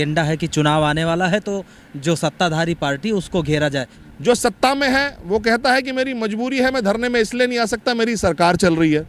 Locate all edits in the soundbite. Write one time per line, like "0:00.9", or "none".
0:03.9